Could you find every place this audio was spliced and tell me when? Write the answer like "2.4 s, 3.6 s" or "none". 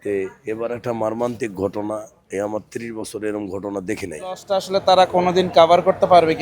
4.5 s